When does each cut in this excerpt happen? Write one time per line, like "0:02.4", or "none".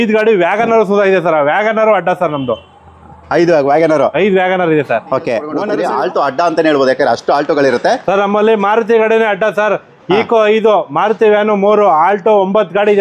0:05.2

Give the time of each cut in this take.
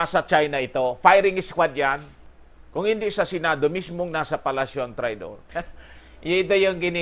0:02.2
0:05.5

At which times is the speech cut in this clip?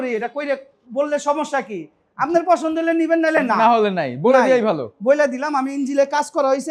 none

